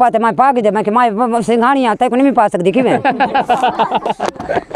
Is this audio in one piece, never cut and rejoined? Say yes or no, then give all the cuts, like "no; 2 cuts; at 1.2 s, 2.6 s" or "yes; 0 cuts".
yes; 0 cuts